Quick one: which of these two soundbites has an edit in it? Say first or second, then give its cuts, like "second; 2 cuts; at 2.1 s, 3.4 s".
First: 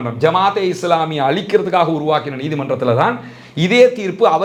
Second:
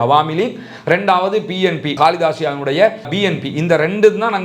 second; 2 cuts; at 2.0 s, 3.1 s